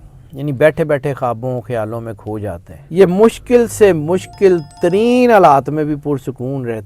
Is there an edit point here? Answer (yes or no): yes